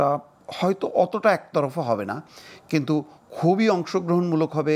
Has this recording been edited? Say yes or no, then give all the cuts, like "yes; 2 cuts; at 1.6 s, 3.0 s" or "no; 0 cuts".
no; 0 cuts